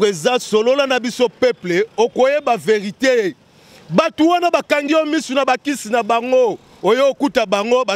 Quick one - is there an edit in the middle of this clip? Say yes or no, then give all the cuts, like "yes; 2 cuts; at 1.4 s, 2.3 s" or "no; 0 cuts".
no; 0 cuts